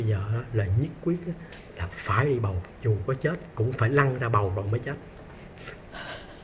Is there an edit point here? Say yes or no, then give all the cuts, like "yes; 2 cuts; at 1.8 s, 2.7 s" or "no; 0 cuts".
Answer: no; 0 cuts